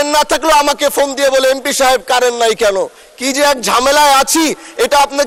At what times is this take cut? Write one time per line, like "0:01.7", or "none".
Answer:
none